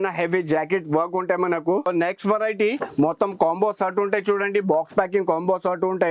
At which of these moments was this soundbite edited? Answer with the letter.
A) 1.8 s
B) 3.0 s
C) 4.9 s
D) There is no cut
A